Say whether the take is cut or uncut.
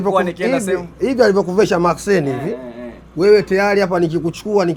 uncut